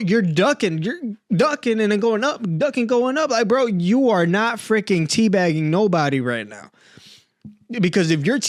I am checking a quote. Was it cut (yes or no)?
no